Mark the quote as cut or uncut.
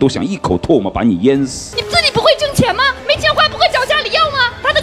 cut